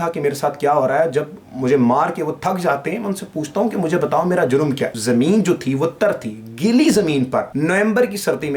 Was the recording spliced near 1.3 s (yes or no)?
no